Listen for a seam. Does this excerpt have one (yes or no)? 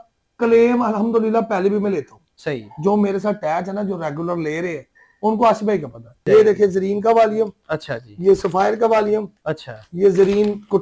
yes